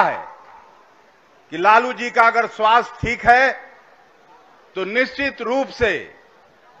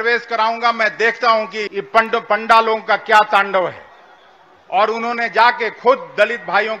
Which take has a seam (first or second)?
second